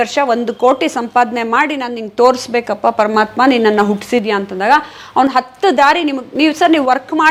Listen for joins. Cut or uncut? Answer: uncut